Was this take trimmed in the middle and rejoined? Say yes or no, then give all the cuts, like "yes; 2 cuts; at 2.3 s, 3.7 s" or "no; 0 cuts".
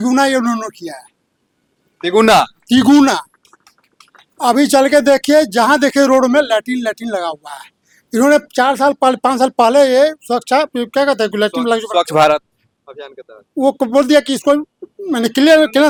no; 0 cuts